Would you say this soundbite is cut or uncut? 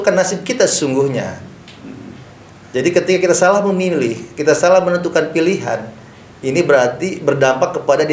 uncut